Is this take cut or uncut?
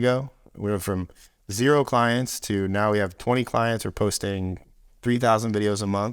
uncut